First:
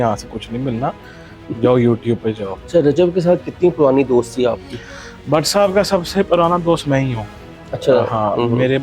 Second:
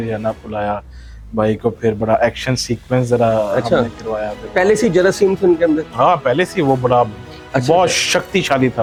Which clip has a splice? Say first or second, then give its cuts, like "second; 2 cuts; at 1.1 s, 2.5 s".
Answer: first; 1 cut; at 2.5 s